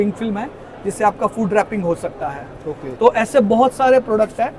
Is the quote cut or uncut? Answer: uncut